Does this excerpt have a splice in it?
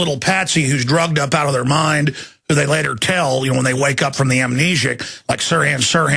no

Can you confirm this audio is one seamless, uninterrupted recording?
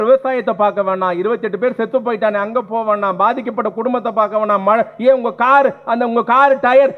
yes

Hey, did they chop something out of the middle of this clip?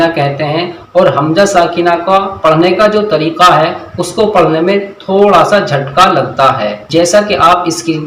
yes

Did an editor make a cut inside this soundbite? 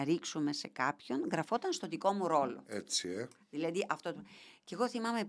no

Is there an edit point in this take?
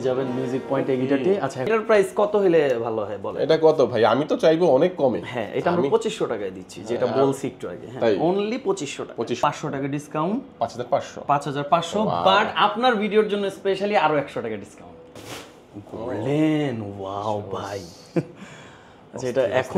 yes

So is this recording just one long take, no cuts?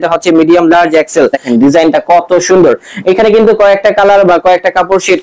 no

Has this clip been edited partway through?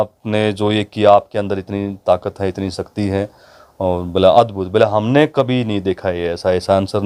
no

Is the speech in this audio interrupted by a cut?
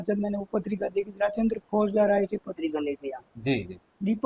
no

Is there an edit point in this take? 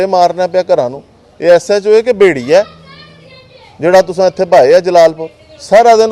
no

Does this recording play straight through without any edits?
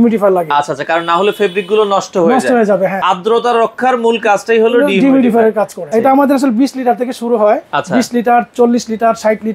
no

